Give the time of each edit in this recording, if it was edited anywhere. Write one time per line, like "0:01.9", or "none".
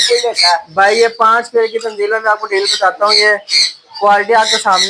none